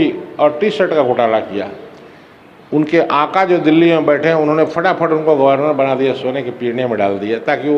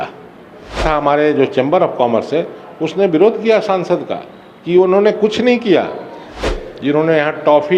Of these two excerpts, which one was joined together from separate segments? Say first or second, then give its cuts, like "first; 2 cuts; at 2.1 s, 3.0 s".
second; 2 cuts; at 0.8 s, 6.4 s